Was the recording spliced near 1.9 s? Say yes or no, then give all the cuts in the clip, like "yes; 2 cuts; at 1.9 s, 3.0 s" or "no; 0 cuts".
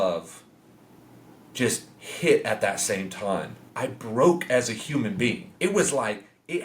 no; 2 cuts; at 3.6 s, 5.5 s